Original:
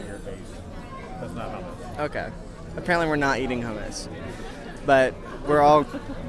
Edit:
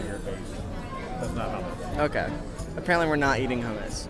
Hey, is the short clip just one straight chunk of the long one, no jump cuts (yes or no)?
yes